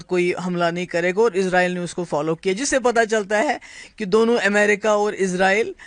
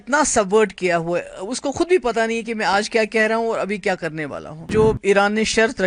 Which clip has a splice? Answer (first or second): second